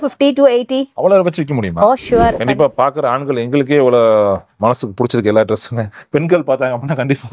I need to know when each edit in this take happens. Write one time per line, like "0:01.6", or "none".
0:02.4